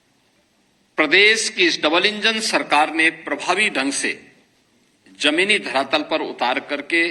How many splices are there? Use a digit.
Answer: 1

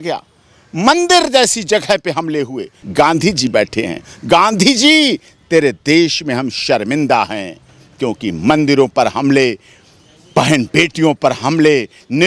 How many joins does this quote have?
1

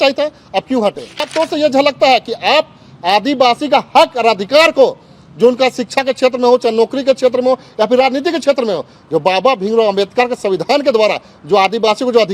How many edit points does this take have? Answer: 1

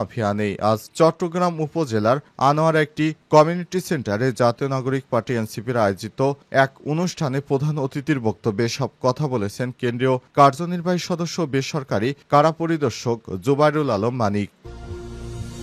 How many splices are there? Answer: 1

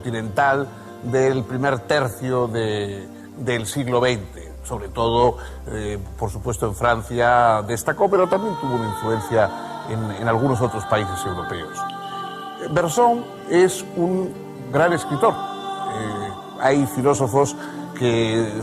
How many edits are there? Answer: 1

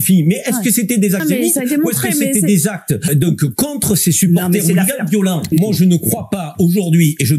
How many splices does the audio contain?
3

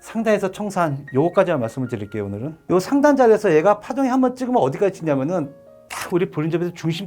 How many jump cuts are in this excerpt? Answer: 1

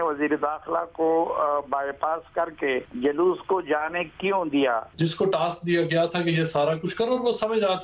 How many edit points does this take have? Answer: 2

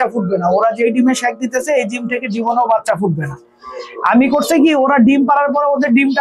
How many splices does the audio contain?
0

